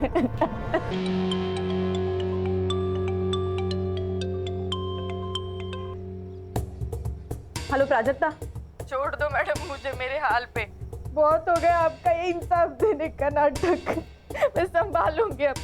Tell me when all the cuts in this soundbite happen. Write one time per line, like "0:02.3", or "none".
0:00.9